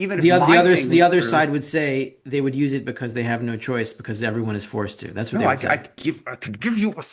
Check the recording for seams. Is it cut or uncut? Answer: cut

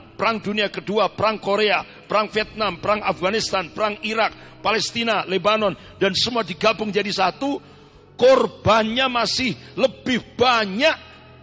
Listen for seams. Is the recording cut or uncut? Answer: uncut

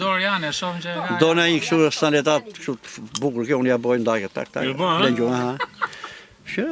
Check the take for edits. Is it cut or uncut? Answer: uncut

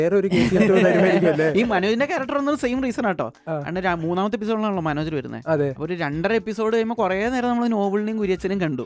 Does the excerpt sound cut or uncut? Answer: uncut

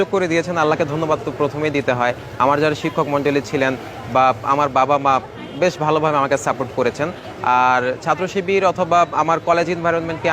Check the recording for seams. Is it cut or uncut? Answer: uncut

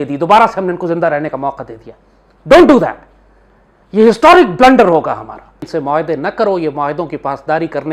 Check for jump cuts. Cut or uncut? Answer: cut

